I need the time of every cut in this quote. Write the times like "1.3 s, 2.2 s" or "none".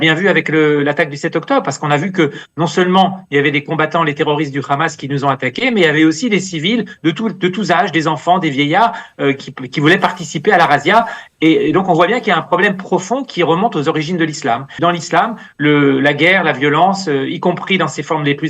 14.8 s